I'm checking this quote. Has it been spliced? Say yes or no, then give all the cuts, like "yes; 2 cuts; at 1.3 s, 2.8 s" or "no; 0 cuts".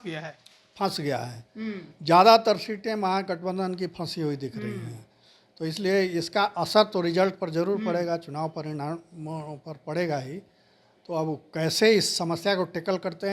no; 0 cuts